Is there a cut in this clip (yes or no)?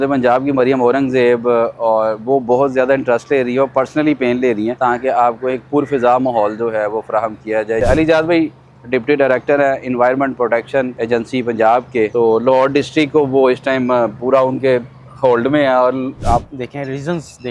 yes